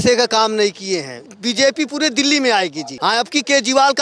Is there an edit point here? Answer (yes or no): yes